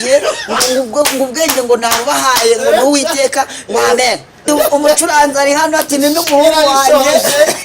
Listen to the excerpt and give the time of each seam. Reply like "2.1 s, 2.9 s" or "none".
4.4 s